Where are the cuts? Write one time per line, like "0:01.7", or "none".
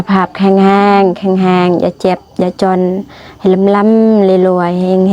none